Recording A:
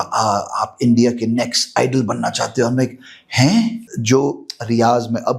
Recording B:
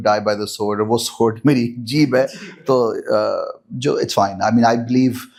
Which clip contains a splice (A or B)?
A